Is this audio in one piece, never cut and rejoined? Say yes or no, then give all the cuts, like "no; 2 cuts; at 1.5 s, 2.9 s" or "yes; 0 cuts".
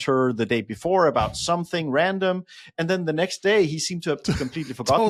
yes; 0 cuts